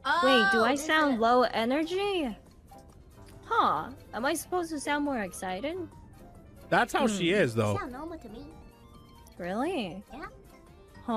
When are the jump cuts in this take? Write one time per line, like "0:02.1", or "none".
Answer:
none

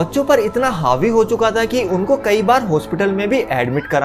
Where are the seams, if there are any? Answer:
none

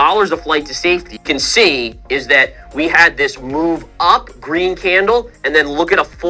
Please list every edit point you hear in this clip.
0:01.2

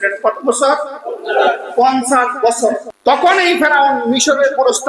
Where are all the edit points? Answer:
0:02.8

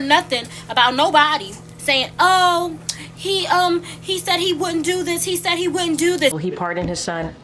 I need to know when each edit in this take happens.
none

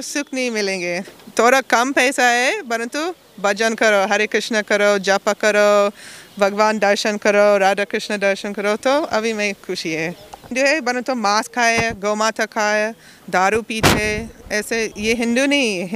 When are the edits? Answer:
0:01.1
0:10.4

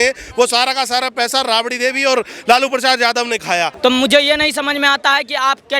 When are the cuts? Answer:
0:03.7

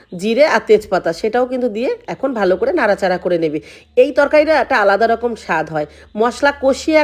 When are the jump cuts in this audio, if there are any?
none

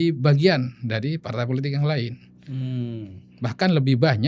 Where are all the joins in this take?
none

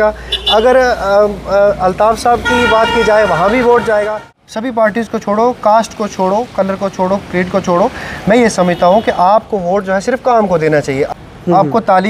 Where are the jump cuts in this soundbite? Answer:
0:04.4
0:11.1

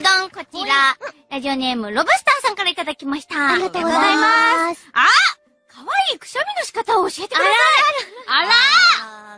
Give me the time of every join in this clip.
none

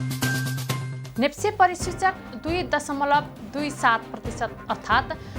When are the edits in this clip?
0:01.0

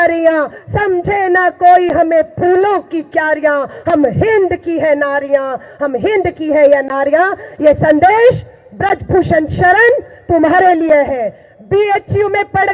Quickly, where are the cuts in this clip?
none

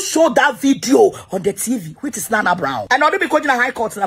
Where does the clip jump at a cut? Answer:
0:02.8

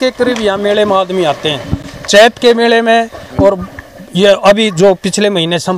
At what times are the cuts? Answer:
none

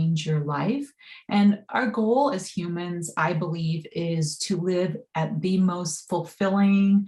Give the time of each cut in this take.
none

